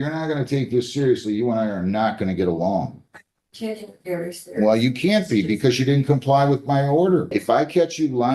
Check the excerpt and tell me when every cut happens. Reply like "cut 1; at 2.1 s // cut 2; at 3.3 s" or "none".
cut 1; at 7.3 s